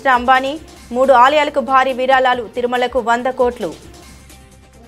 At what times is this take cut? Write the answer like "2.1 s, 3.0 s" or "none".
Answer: 3.8 s